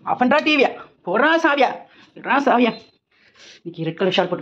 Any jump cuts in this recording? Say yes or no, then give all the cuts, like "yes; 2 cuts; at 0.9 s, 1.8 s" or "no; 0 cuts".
no; 0 cuts